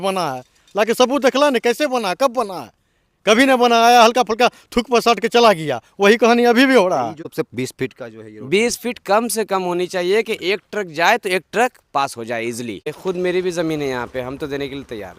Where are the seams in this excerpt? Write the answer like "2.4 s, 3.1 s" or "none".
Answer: 7.2 s, 12.9 s